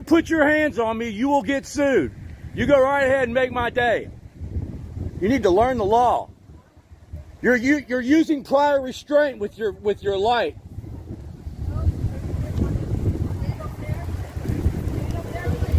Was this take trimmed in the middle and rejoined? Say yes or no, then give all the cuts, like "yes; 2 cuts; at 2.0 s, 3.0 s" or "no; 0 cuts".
no; 0 cuts